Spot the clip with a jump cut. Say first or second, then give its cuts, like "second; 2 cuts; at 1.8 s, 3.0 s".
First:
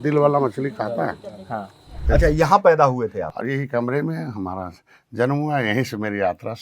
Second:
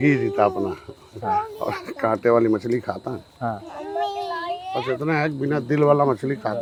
first; 2 cuts; at 2.0 s, 3.3 s